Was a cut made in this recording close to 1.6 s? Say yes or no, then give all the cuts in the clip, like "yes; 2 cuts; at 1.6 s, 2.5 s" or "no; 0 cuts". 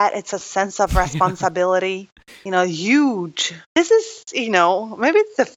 no; 1 cut; at 3.7 s